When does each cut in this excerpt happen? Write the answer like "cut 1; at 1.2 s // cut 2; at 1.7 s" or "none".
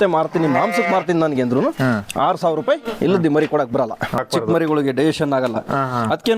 cut 1; at 4.2 s